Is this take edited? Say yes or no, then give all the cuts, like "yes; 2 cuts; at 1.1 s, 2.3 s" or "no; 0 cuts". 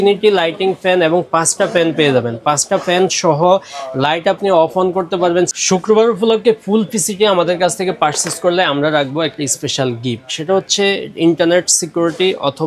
yes; 1 cut; at 5.5 s